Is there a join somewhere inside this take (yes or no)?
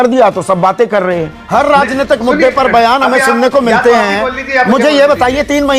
yes